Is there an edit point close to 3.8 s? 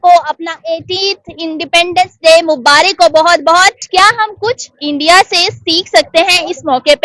yes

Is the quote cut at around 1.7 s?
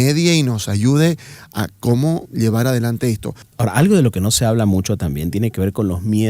no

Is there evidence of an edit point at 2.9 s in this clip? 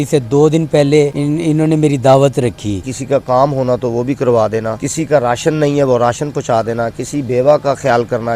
yes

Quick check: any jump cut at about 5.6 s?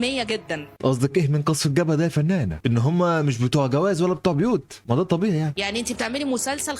no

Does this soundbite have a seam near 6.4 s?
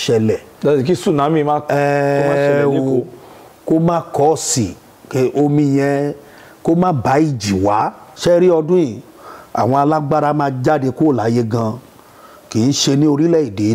no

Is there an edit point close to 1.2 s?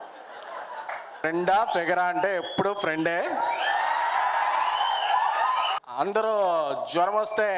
yes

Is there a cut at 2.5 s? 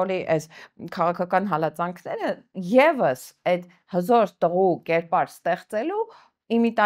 no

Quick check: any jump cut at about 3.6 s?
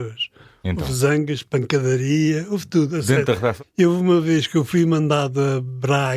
yes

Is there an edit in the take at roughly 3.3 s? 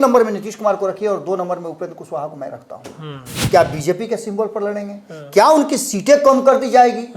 yes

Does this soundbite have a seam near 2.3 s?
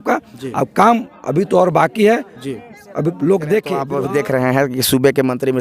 no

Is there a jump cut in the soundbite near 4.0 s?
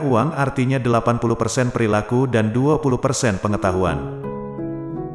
yes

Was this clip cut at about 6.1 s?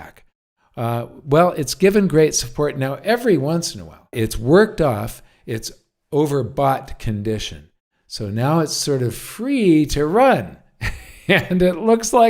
no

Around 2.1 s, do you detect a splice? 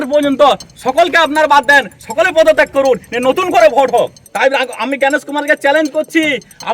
no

